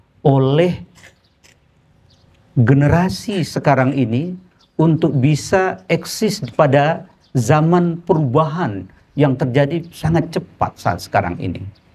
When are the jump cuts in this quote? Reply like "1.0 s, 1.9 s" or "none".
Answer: none